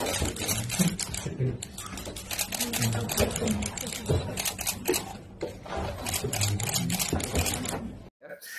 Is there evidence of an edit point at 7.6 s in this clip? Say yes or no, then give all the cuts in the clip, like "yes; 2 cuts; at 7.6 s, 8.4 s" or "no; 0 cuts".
no; 0 cuts